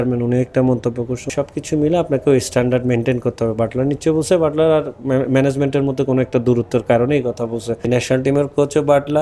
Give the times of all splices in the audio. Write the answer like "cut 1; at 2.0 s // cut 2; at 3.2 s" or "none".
cut 1; at 1.3 s // cut 2; at 7.8 s

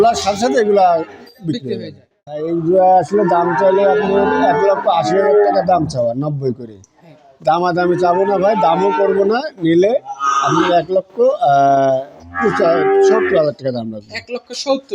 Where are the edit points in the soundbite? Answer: cut 1; at 2.4 s

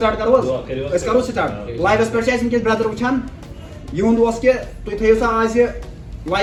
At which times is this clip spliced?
none

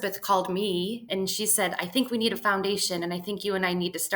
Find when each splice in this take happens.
cut 1; at 1.1 s

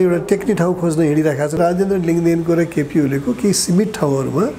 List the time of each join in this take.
cut 1; at 1.6 s

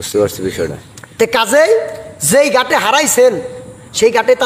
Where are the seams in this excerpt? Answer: none

